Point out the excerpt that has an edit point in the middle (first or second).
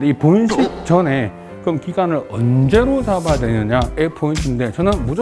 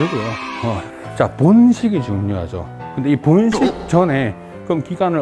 second